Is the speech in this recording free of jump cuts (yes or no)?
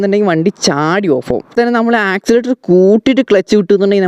no